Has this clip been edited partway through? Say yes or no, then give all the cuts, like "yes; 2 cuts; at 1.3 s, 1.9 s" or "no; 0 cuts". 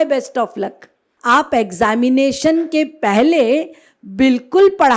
yes; 1 cut; at 1.1 s